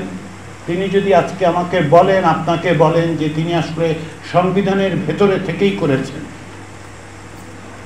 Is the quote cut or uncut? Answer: uncut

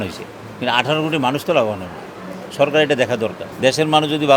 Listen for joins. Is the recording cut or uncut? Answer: cut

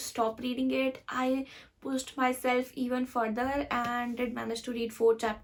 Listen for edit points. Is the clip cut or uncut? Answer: uncut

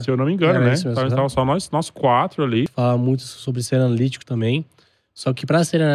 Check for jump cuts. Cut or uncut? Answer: cut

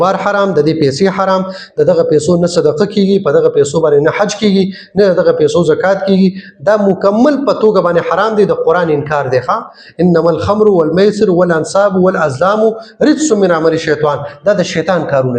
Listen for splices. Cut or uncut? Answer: uncut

